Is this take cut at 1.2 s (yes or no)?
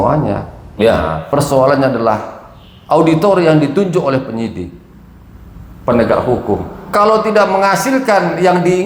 yes